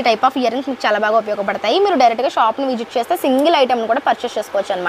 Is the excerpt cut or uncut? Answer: uncut